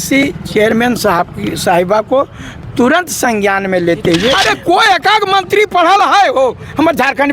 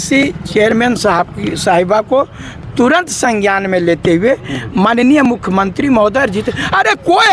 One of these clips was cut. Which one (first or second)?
first